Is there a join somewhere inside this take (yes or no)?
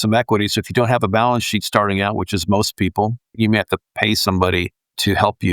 yes